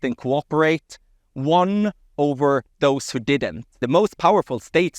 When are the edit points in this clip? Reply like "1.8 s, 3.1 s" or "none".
3.8 s